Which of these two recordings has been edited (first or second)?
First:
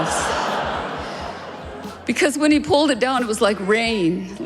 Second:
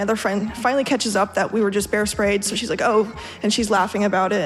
first